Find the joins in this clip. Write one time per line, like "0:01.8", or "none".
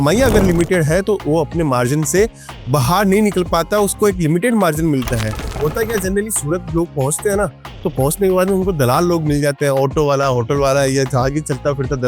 0:05.4